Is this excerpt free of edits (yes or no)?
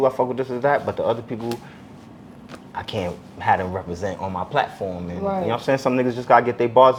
yes